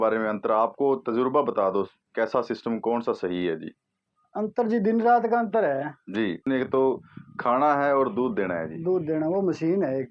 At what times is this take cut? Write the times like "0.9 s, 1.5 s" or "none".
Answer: 6.4 s